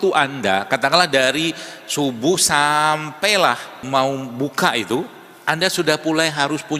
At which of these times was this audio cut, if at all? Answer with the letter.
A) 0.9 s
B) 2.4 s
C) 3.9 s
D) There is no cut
C